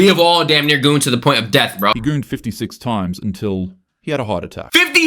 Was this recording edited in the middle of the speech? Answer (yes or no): yes